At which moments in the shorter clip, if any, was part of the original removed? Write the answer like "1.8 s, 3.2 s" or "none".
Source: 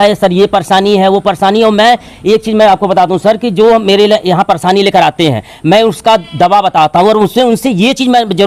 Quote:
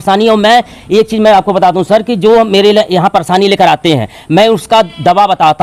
none